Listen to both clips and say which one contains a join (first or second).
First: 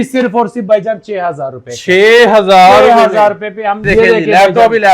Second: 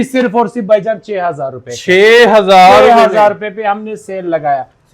first